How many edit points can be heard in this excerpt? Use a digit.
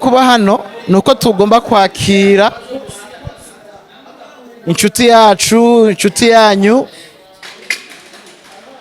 0